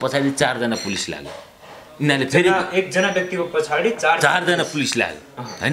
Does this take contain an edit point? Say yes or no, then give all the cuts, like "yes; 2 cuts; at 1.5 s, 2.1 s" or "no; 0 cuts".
no; 0 cuts